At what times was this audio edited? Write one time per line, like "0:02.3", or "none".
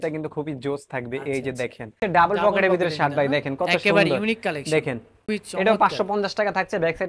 0:02.0
0:05.3